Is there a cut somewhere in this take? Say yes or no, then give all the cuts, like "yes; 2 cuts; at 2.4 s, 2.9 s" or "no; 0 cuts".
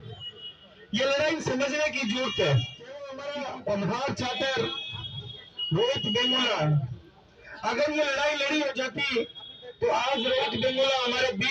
yes; 1 cut; at 3.2 s